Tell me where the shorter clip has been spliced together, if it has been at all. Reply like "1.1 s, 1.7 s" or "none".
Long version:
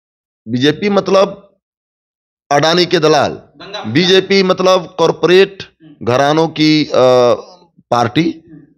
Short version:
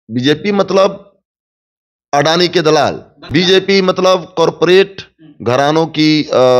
3.4 s